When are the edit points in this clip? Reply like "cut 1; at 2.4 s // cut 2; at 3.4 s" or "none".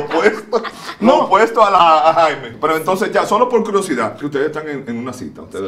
cut 1; at 1.7 s // cut 2; at 4.2 s